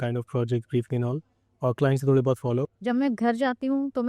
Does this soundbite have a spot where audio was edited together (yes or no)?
yes